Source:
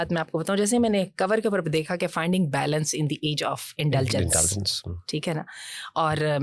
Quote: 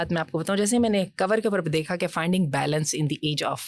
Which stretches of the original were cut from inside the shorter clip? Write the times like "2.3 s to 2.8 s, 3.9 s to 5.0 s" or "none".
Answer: none